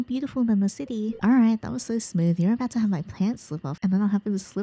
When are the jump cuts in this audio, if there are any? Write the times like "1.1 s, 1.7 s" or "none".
1.2 s